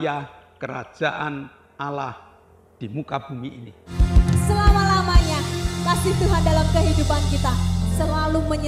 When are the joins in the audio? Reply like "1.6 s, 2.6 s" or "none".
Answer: 4.0 s